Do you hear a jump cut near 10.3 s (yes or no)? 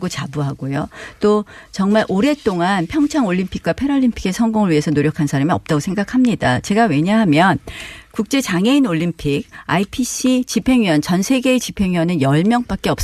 yes